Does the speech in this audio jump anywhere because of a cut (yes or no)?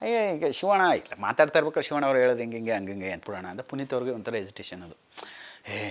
yes